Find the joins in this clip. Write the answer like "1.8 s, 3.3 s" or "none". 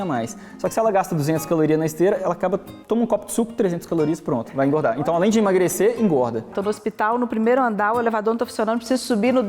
6.5 s